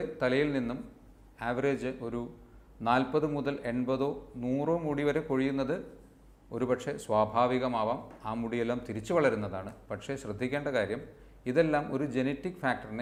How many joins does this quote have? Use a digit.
0